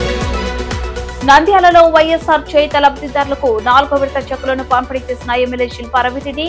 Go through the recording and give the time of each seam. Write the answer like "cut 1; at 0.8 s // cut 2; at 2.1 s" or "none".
cut 1; at 1.0 s